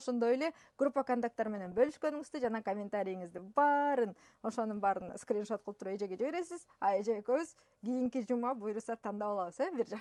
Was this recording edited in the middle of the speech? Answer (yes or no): no